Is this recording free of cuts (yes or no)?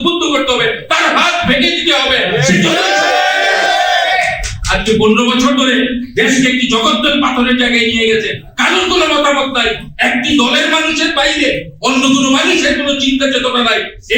yes